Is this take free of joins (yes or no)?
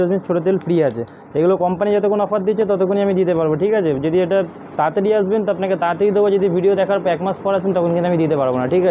yes